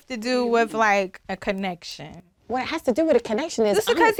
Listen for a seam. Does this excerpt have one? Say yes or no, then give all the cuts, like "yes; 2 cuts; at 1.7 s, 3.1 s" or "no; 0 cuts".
no; 0 cuts